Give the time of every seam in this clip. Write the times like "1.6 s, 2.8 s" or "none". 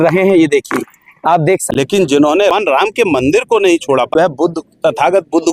1.7 s, 2.5 s, 4.1 s